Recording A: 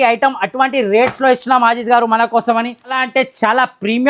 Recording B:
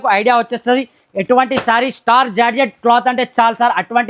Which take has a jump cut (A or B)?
A